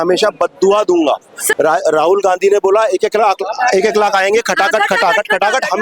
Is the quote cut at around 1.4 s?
yes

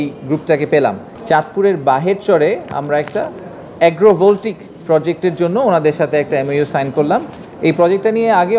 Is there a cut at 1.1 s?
yes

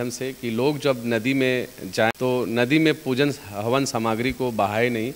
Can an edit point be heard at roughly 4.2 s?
no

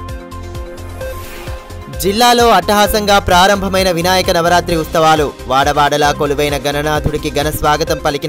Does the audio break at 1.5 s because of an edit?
yes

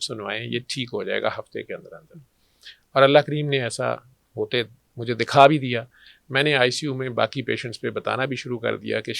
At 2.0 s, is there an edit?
no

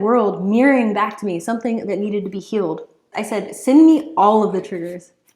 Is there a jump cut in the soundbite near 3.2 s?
yes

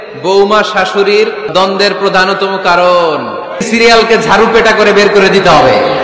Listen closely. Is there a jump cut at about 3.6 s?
yes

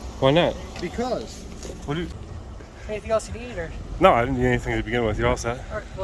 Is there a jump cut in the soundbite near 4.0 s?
no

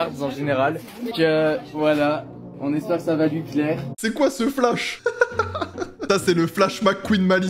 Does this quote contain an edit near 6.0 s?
yes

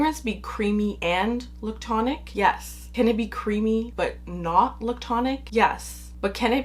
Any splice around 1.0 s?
yes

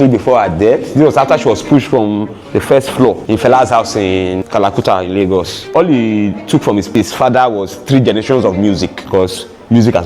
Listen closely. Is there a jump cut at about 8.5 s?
no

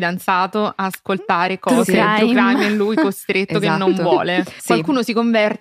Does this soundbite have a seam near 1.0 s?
no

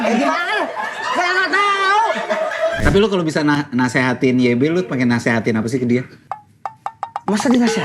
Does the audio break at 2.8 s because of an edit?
yes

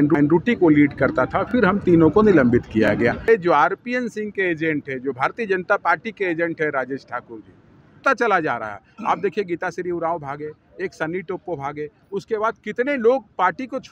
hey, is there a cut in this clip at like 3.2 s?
yes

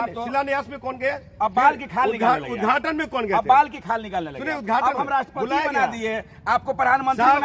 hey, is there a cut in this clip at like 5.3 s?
no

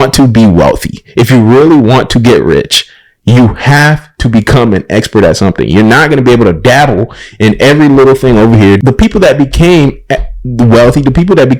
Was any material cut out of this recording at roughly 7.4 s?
no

